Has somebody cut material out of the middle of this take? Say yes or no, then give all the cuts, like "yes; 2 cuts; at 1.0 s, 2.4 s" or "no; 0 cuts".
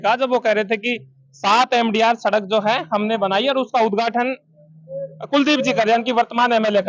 no; 0 cuts